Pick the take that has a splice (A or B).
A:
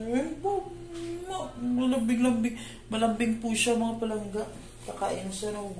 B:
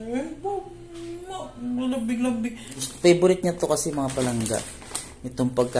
B